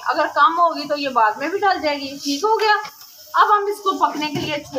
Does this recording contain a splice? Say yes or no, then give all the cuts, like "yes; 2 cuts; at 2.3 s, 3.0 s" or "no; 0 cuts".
no; 0 cuts